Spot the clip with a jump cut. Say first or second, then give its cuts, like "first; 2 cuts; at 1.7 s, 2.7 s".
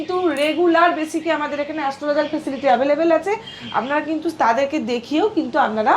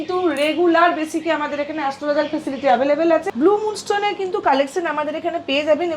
second; 1 cut; at 3.3 s